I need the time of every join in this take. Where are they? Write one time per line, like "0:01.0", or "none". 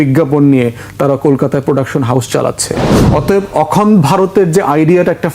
0:02.9